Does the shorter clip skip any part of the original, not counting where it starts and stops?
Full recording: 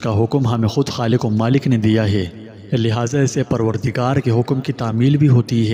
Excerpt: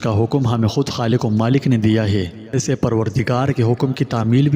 yes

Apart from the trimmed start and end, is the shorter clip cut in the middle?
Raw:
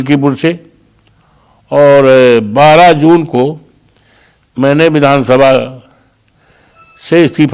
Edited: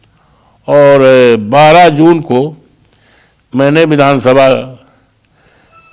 no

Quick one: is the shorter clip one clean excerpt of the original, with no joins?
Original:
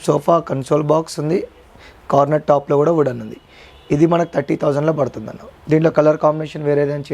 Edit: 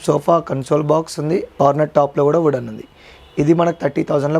no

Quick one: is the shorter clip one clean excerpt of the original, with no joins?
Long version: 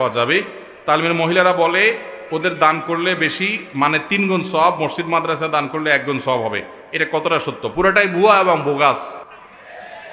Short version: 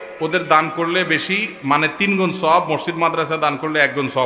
yes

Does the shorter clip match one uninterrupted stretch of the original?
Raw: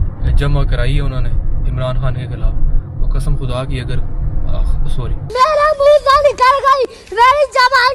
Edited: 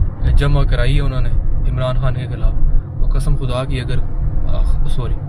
yes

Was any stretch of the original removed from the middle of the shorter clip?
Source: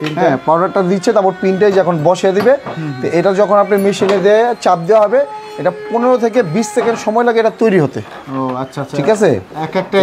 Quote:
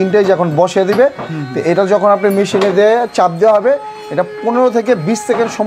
no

